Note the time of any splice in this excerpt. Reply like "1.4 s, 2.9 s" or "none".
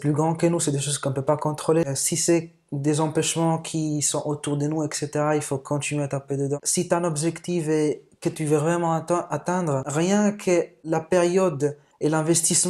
6.6 s